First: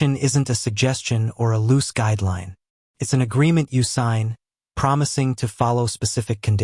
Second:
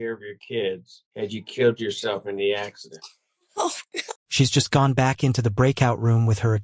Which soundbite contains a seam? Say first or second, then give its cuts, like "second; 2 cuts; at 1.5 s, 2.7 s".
second; 2 cuts; at 1.0 s, 4.2 s